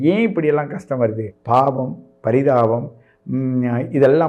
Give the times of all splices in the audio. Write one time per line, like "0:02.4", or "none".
0:01.3